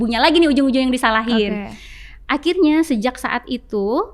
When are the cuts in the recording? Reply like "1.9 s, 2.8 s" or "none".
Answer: none